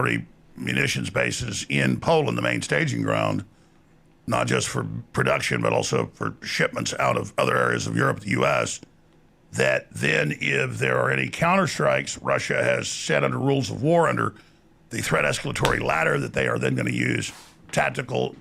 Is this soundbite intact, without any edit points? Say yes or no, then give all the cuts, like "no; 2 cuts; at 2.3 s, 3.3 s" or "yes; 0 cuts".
yes; 0 cuts